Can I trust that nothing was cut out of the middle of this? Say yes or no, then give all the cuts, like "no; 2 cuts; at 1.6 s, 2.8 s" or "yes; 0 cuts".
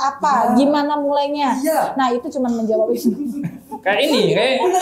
yes; 0 cuts